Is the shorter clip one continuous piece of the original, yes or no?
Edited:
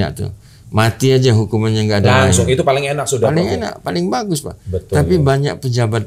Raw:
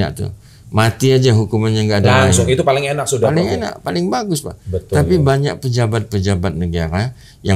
yes